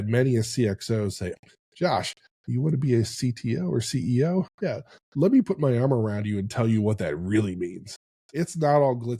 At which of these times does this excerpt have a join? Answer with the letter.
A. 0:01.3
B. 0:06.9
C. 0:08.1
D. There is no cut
A